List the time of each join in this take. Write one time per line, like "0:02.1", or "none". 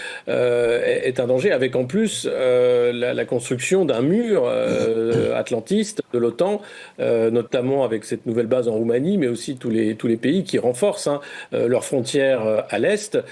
none